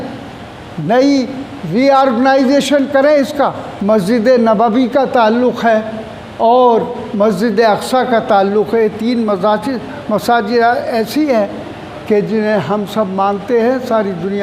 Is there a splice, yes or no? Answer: yes